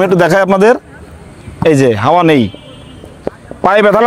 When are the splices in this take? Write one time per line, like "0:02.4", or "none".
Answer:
none